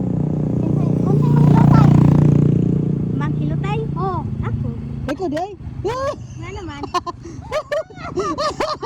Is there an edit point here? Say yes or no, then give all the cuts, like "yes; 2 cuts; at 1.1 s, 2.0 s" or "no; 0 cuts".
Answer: no; 0 cuts